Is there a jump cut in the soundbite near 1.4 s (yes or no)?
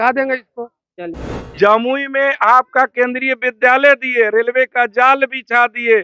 yes